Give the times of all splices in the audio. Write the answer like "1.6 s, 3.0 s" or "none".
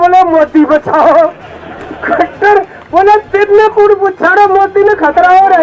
none